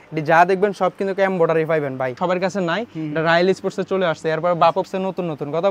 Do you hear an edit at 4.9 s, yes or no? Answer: yes